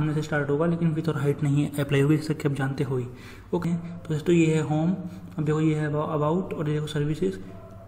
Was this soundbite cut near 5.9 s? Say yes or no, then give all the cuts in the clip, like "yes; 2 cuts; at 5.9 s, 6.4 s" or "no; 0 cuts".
no; 1 cut; at 3.6 s